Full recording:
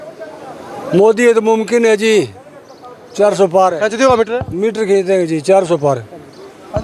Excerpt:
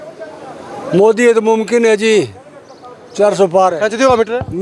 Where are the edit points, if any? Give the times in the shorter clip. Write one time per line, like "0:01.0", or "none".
none